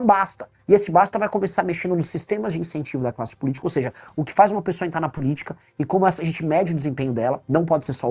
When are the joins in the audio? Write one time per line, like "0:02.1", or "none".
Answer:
none